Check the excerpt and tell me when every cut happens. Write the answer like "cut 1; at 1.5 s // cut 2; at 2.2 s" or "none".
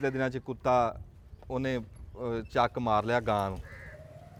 none